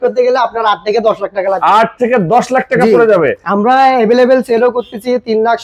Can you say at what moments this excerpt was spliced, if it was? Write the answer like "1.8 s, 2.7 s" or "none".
none